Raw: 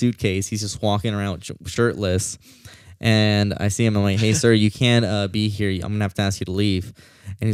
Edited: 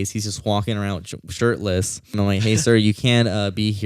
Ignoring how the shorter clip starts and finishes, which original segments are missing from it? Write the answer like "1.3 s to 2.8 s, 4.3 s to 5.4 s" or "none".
2.5 s to 3.9 s